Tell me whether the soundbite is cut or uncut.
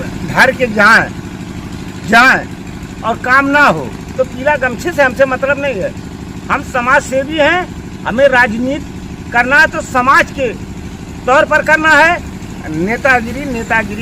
uncut